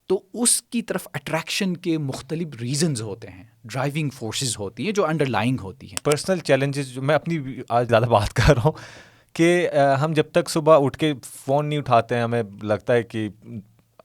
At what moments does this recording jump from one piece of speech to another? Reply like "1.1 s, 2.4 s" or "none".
5.9 s, 7.9 s